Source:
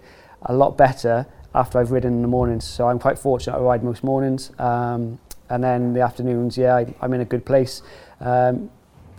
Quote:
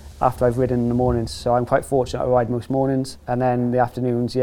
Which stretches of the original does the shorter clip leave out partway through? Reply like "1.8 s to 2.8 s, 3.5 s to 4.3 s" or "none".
4.5 s to 5.4 s